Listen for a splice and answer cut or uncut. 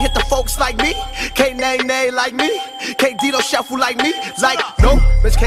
uncut